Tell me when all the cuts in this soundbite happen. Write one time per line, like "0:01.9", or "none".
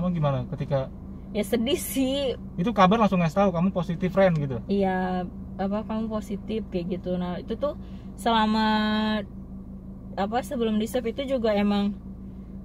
none